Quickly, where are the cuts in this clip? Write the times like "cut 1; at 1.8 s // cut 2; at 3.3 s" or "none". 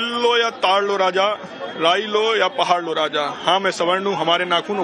cut 1; at 2.2 s